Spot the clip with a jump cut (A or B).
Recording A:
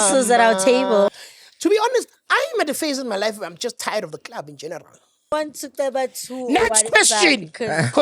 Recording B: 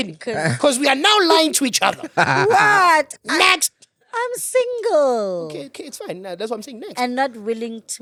A